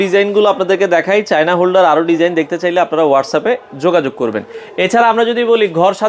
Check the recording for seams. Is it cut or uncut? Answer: uncut